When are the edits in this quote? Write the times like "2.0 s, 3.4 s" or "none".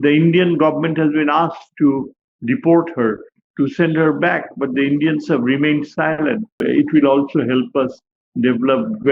6.6 s